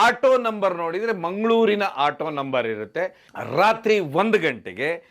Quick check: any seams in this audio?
yes; 1 cut; at 3.3 s

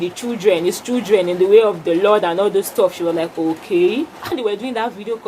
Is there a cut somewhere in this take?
yes; 1 cut; at 4.3 s

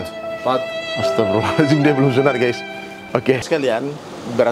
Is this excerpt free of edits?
no; 1 cut; at 3.4 s

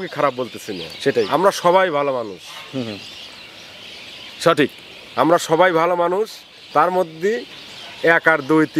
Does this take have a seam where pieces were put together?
no; 0 cuts

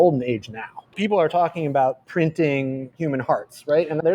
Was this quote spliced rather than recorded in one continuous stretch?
yes; 1 cut; at 1.0 s

